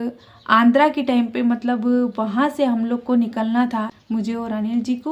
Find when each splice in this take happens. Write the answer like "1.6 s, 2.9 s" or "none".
3.9 s